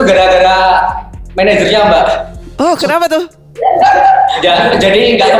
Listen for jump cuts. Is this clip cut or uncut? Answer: uncut